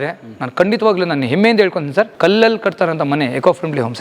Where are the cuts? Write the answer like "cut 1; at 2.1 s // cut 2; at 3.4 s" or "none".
cut 1; at 2.1 s